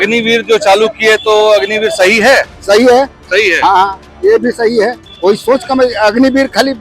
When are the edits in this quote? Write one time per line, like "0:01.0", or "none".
0:05.1